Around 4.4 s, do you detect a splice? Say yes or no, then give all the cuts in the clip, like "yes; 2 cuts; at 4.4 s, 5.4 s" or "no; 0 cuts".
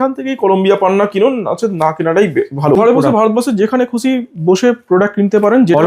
no; 1 cut; at 2.8 s